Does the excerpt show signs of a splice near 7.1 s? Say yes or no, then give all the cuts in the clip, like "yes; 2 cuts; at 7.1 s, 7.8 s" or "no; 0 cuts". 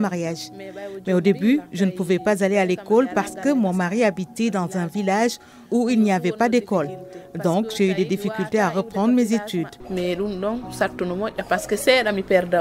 no; 1 cut; at 9.8 s